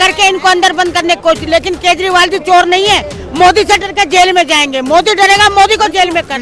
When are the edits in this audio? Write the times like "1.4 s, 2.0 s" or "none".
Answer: none